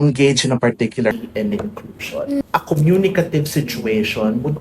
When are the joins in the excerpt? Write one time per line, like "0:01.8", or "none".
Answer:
0:01.1